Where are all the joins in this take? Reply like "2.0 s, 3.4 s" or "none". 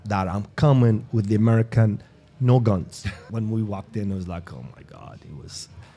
3.2 s